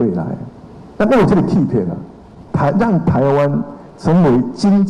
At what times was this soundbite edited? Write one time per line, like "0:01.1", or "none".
0:02.4